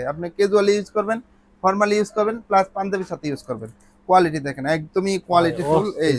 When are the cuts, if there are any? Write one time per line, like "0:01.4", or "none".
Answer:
none